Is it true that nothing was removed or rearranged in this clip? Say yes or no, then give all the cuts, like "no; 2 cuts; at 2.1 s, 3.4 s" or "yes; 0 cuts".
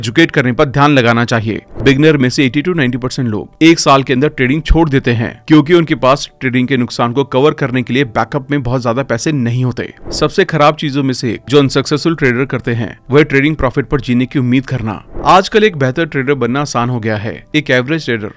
no; 3 cuts; at 1.7 s, 10.0 s, 15.0 s